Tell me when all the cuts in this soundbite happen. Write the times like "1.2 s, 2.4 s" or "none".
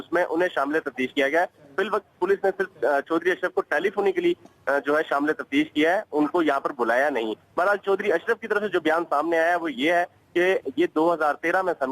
6.7 s